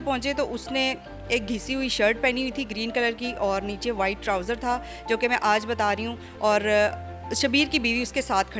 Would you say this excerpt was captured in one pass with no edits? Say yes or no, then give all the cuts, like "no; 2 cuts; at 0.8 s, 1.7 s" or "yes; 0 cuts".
yes; 0 cuts